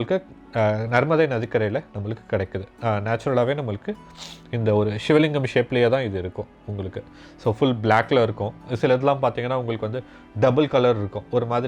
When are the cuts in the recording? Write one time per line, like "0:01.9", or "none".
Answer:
none